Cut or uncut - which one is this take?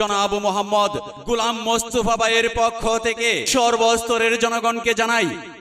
uncut